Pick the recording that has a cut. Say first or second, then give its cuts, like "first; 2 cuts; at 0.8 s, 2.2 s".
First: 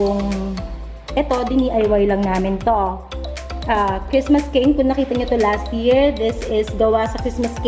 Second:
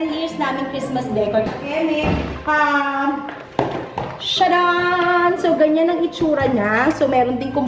second; 1 cut; at 1.5 s